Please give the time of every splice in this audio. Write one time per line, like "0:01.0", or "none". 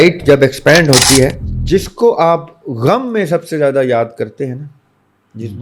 0:01.5